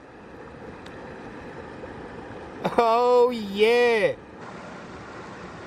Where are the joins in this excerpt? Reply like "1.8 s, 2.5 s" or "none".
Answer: 4.4 s